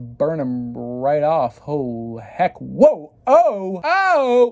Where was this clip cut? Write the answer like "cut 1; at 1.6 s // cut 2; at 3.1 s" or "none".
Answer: none